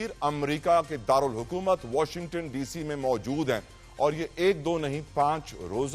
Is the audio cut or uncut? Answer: uncut